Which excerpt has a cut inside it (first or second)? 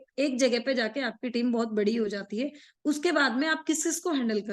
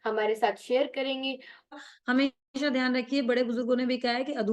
second